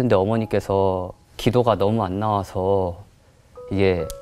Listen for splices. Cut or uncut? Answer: cut